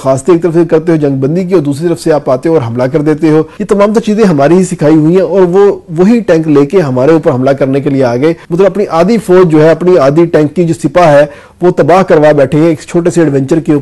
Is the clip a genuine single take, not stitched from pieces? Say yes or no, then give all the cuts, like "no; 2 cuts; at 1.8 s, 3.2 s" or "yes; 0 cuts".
no; 2 cuts; at 3.6 s, 8.4 s